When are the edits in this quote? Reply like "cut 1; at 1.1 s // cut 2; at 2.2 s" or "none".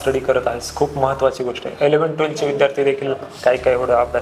none